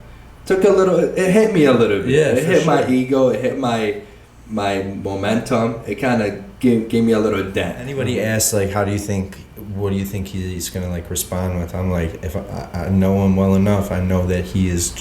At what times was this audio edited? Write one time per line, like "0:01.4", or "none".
0:08.0